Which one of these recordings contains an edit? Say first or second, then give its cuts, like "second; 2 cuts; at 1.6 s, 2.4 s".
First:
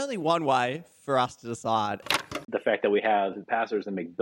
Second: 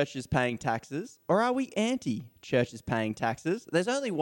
first; 2 cuts; at 2.1 s, 3.4 s